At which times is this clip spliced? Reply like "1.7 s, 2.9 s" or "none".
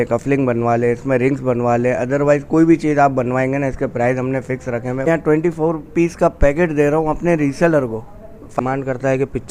5.1 s, 8.6 s

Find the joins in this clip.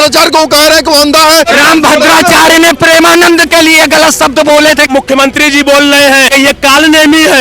1.5 s, 4.9 s, 6.3 s

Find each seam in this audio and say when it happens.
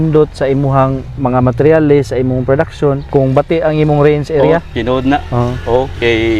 3.0 s

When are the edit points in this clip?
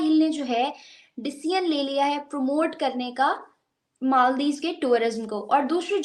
none

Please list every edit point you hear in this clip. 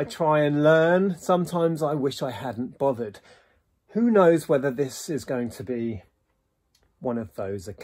none

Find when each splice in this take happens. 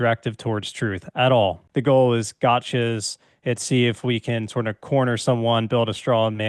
1.6 s

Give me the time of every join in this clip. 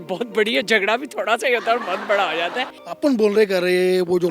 2.8 s

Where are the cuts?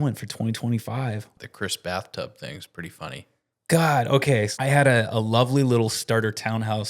1.4 s, 4.5 s

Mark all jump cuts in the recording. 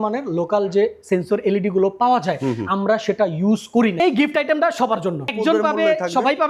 4.0 s, 5.3 s

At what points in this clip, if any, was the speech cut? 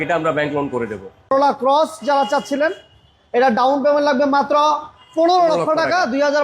1.1 s

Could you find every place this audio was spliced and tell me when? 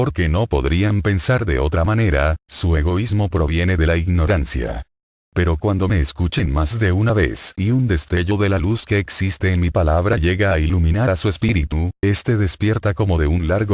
9.5 s

